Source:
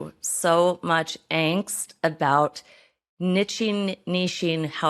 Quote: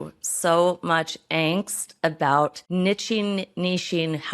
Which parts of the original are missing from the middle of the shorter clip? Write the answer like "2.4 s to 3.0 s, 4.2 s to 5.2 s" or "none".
2.6 s to 3.1 s